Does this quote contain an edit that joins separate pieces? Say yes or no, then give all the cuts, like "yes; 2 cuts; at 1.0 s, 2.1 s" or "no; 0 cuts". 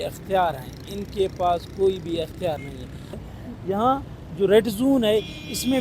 yes; 1 cut; at 3.2 s